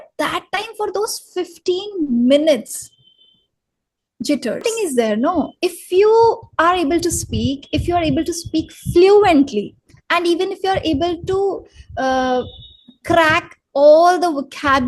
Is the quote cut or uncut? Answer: cut